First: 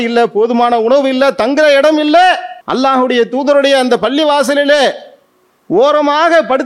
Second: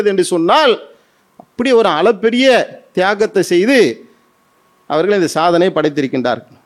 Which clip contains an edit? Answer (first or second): first